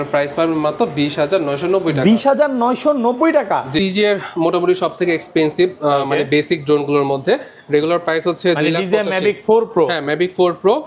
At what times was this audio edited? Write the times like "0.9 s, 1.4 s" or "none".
3.8 s